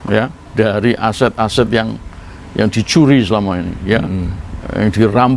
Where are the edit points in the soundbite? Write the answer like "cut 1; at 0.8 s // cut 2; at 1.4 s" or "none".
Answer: none

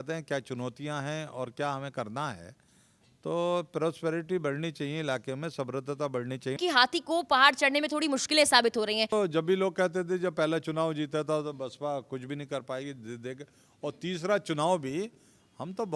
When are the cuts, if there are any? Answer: cut 1; at 6.6 s // cut 2; at 9.1 s

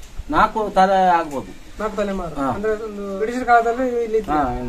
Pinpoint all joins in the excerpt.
cut 1; at 3.2 s

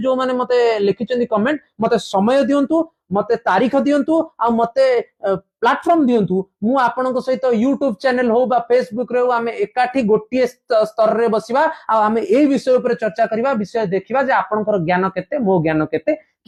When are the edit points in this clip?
none

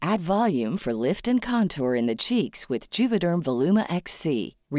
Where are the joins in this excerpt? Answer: none

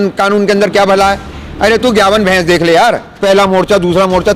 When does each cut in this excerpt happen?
cut 1; at 3.1 s

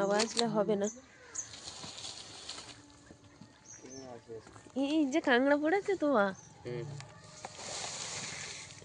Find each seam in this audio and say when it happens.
cut 1; at 1.6 s

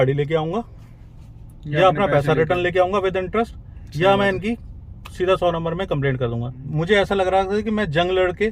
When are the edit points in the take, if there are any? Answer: cut 1; at 6.6 s

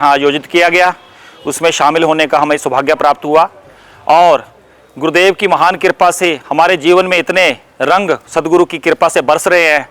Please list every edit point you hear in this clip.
none

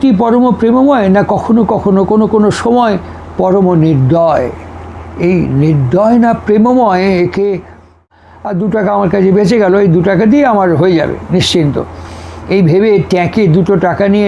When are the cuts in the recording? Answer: cut 1; at 8.1 s

